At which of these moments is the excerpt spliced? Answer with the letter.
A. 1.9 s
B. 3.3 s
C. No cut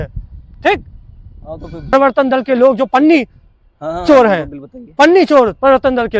A